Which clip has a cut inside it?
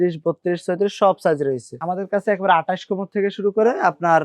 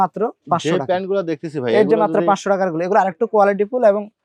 first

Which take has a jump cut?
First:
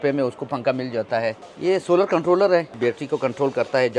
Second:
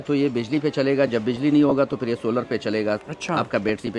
first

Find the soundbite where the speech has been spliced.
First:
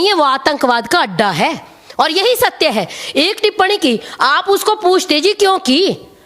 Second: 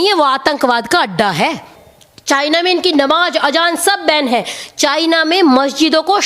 second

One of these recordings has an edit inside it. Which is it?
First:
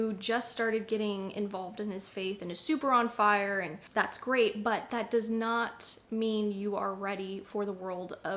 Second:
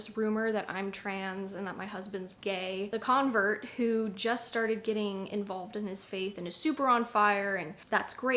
second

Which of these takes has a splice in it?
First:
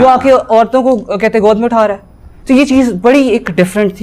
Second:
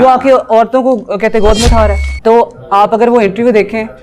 second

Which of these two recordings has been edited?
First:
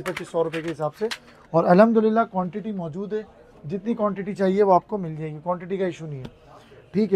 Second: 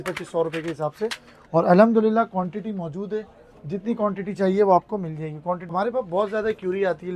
second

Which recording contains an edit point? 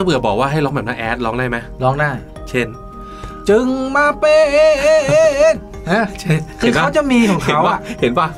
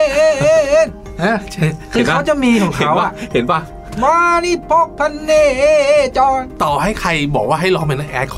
second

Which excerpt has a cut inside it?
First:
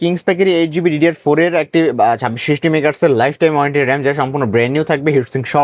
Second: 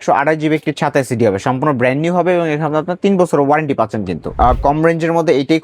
second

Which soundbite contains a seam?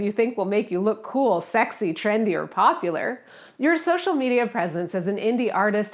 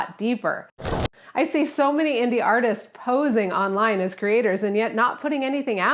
second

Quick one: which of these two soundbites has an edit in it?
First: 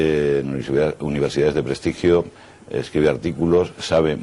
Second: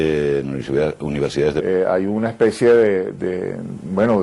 first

